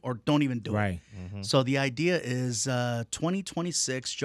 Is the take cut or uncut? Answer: uncut